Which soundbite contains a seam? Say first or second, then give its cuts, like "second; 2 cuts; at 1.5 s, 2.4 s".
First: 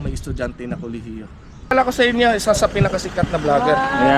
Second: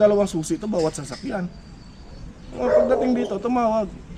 first; 1 cut; at 1.7 s